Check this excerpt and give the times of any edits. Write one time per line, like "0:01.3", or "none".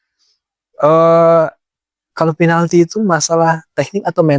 none